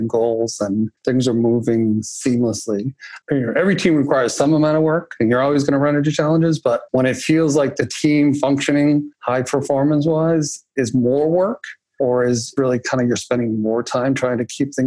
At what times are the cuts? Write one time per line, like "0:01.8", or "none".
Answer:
0:00.9
0:03.1
0:06.8
0:07.9
0:09.2
0:12.2